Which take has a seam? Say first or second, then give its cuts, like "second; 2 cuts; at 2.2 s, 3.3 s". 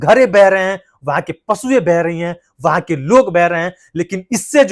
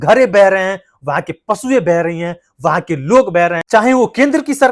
second; 1 cut; at 3.7 s